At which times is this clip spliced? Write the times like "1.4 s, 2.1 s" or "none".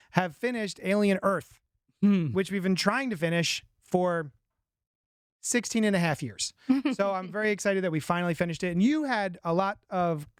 none